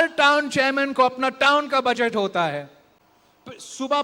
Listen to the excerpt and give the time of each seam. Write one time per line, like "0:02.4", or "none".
none